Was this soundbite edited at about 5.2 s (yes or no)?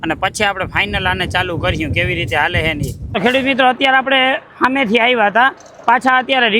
no